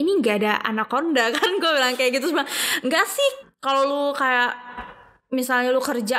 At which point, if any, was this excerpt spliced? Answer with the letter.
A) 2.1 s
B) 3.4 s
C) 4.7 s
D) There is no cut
B